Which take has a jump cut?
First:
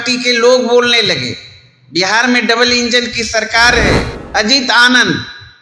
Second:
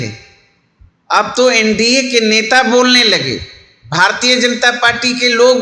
first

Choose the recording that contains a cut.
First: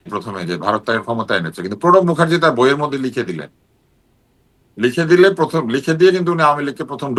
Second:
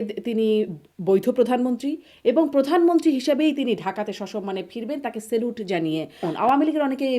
second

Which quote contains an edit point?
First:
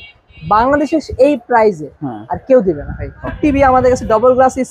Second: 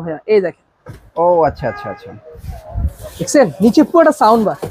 first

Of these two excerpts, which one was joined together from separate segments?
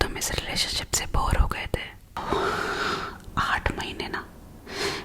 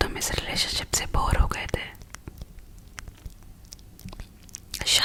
first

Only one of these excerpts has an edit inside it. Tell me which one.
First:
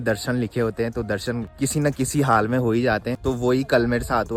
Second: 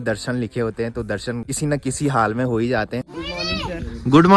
second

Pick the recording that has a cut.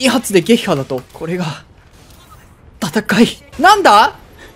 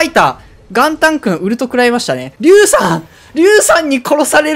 first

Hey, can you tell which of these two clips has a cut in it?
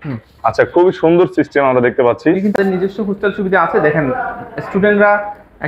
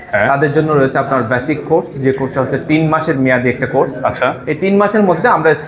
first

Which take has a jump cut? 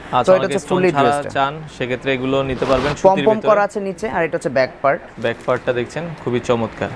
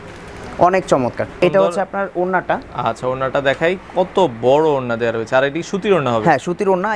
second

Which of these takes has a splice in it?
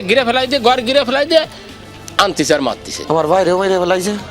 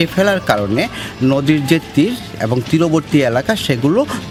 first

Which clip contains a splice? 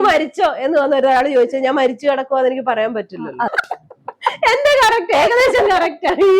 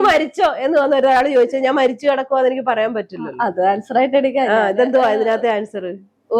first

